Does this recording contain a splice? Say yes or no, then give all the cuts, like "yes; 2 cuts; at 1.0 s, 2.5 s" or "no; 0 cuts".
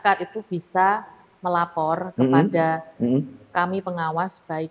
no; 0 cuts